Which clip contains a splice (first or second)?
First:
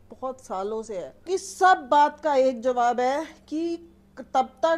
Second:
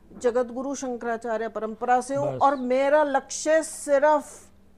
first